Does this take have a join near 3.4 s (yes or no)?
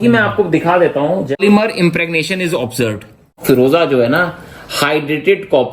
yes